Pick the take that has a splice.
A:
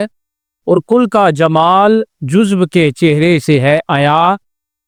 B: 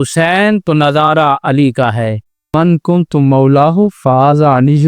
B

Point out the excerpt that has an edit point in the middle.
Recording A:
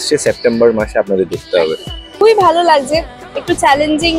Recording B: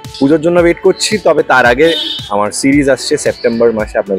A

